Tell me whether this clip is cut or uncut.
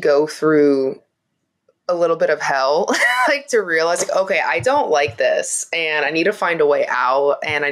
uncut